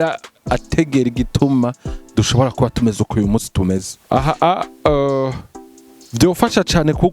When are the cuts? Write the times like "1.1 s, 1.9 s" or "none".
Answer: 3.9 s